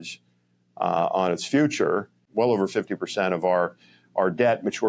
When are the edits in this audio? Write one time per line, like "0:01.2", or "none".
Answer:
0:02.2